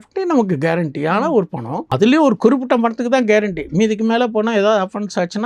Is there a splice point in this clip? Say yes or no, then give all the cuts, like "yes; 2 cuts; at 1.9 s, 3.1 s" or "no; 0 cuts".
yes; 1 cut; at 1.8 s